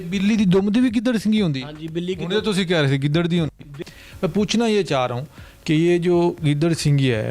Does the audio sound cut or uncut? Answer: cut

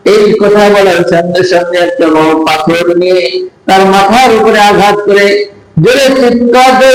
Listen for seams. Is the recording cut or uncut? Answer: uncut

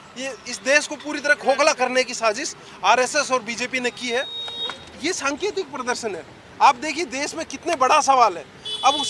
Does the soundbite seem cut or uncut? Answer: cut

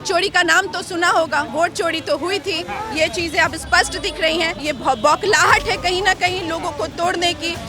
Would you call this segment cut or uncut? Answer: cut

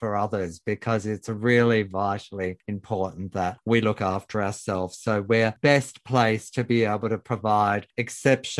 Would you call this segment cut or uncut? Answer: uncut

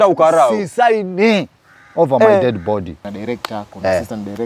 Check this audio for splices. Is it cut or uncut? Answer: cut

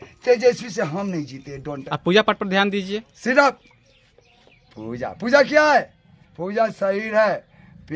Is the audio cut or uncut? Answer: cut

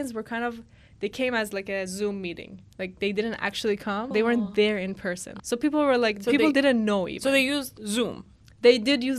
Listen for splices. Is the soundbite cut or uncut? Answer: cut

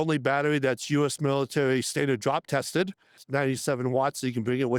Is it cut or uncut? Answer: cut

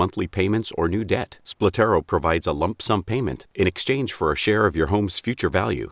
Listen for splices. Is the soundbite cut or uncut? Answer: cut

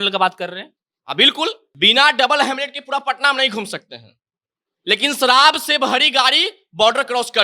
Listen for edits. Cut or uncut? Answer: cut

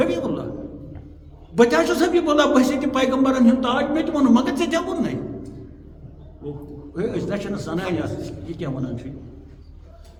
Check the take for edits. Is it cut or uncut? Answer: uncut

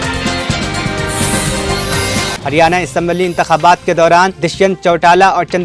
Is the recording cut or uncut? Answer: uncut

